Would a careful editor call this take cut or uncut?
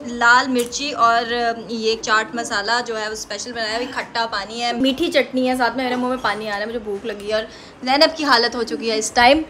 uncut